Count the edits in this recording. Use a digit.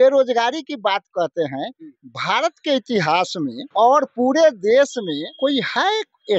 2